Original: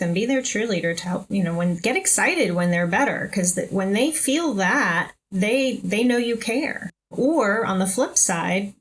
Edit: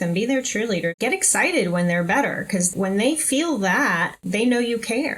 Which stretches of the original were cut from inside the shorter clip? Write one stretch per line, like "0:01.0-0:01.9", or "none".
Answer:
0:01.0-0:01.8
0:03.5-0:03.7
0:05.2-0:05.8